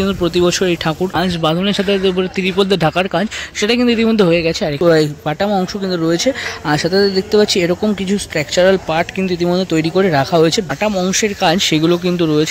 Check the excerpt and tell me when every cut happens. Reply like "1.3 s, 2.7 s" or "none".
1.3 s, 4.8 s, 10.7 s